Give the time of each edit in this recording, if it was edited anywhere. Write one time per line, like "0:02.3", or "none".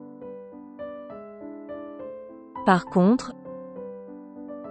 none